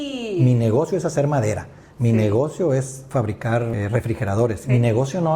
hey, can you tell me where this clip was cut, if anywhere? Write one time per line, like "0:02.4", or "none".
0:03.7